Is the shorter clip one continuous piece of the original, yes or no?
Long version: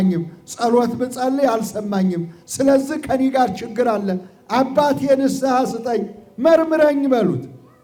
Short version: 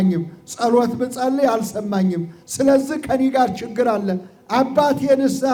yes